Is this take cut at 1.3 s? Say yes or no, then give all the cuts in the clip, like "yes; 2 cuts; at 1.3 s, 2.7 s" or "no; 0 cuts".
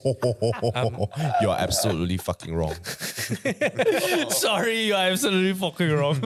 no; 0 cuts